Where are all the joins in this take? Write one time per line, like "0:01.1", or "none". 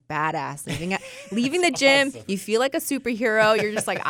none